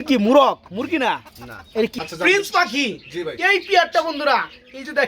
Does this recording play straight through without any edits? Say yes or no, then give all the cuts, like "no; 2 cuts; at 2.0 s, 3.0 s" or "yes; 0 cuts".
no; 1 cut; at 1.9 s